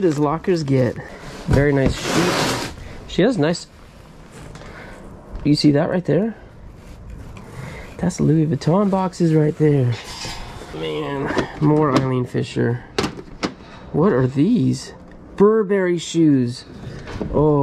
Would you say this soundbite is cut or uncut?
cut